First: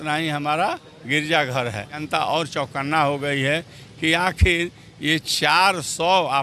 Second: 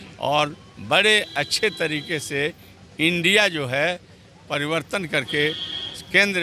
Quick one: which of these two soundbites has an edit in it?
first; 1 cut; at 2.0 s

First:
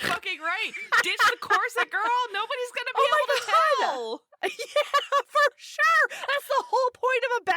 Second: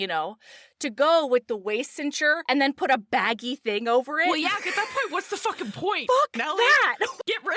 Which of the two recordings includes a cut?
second; 1 cut; at 2.4 s

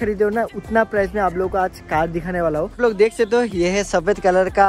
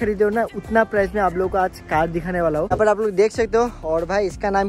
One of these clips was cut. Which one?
second; 1 cut; at 2.7 s

